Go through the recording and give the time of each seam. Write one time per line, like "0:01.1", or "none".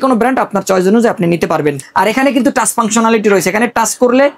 0:01.8